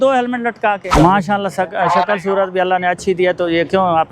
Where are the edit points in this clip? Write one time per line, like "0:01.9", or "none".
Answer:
0:00.9